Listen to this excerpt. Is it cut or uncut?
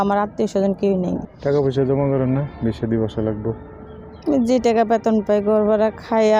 cut